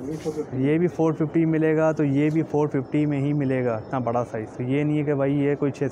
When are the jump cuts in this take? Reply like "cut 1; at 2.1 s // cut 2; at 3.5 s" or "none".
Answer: none